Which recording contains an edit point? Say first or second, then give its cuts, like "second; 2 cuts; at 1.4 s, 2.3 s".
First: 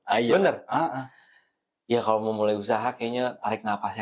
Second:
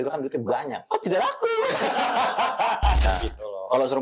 second; 1 cut; at 3.1 s